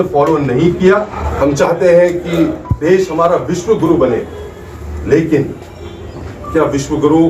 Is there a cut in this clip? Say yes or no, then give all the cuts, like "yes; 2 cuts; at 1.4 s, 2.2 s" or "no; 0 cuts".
yes; 1 cut; at 1.2 s